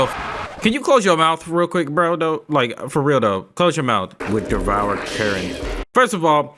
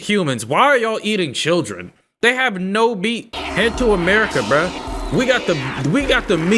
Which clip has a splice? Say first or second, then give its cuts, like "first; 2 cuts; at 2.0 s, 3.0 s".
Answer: first; 1 cut; at 4.2 s